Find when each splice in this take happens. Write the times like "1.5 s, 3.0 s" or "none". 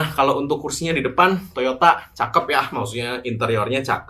none

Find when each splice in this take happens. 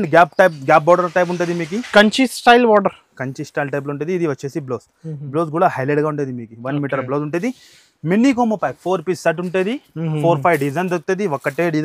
none

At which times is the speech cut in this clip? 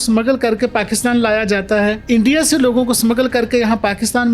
2.0 s

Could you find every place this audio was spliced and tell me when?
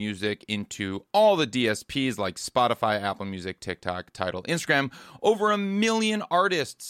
none

